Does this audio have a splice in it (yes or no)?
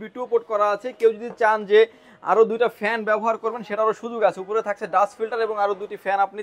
no